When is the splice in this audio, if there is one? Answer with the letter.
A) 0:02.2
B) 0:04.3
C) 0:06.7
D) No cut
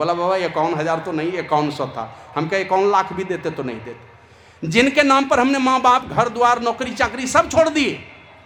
D